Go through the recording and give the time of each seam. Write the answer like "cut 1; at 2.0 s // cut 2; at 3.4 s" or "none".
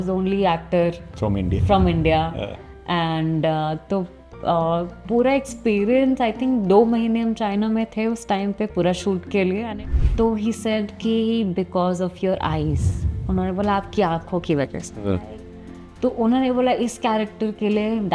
cut 1; at 9.6 s